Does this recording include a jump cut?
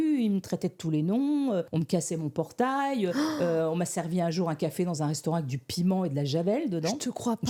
no; 0 cuts

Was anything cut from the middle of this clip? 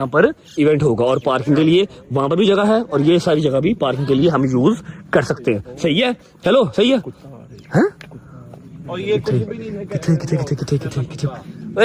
no; 0 cuts

